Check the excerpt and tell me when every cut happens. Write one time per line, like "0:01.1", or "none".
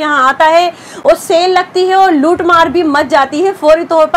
none